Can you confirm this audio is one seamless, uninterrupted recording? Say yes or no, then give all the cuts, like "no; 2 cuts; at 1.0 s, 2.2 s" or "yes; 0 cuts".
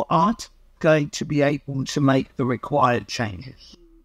yes; 0 cuts